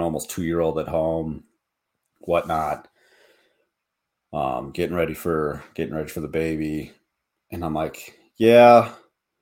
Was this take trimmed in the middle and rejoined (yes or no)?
no